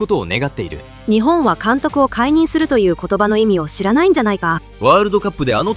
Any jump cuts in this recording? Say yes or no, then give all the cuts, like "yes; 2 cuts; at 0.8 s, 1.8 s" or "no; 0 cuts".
yes; 2 cuts; at 1.0 s, 4.7 s